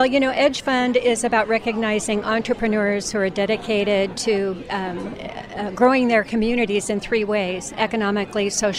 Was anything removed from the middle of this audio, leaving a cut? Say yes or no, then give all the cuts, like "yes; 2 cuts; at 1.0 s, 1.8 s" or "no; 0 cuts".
no; 0 cuts